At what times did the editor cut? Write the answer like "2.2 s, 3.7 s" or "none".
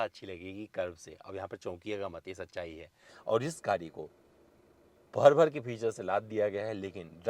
3.1 s